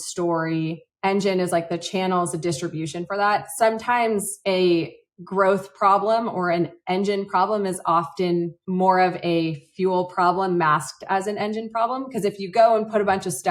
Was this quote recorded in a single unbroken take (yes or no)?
yes